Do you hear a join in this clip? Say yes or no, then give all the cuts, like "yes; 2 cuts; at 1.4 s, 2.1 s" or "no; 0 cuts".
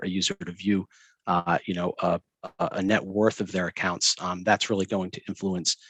no; 0 cuts